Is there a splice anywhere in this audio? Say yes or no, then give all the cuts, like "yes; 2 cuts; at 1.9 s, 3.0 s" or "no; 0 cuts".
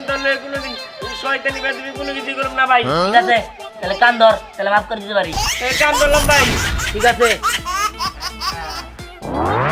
no; 0 cuts